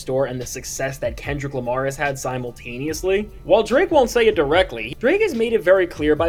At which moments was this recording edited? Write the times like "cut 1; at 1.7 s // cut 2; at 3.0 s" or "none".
none